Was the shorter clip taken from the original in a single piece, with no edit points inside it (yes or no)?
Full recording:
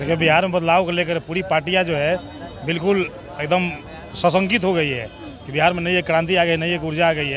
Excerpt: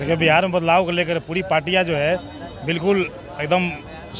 yes